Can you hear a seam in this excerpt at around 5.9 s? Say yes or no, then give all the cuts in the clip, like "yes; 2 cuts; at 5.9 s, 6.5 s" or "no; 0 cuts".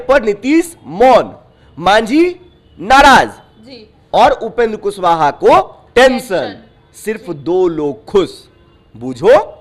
no; 0 cuts